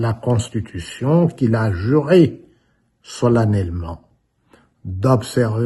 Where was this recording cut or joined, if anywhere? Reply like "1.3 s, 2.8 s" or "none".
none